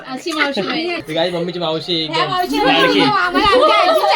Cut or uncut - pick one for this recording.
cut